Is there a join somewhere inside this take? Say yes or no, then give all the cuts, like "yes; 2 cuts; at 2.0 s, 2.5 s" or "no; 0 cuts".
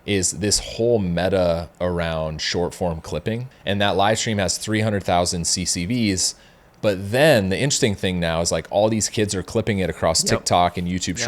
yes; 1 cut; at 3.5 s